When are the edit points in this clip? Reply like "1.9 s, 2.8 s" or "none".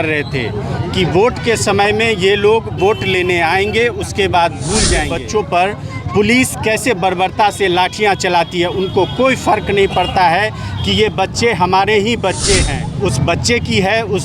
5.1 s, 12.8 s